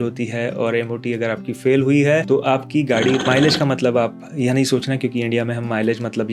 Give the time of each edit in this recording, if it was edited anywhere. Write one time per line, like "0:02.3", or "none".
0:03.2